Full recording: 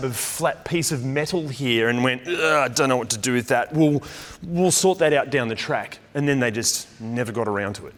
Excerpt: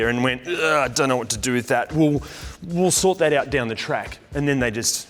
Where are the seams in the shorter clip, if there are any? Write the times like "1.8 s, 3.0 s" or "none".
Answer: none